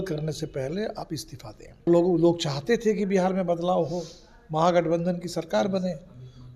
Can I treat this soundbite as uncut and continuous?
no; 1 cut; at 1.9 s

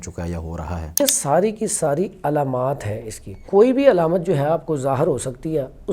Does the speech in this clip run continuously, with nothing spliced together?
no; 2 cuts; at 1.0 s, 3.3 s

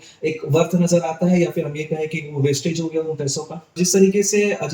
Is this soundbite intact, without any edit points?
no; 1 cut; at 3.7 s

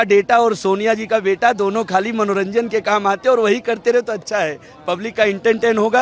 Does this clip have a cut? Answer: no; 0 cuts

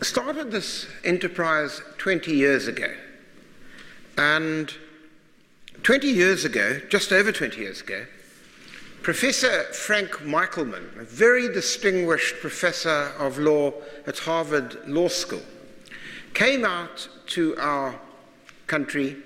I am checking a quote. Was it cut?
no; 0 cuts

